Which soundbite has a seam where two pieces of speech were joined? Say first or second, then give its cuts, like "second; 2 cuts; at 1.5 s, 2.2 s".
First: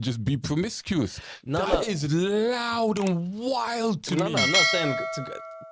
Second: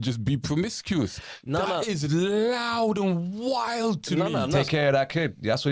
second; 1 cut; at 4.6 s